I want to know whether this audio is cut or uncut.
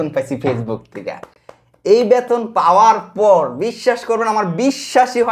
uncut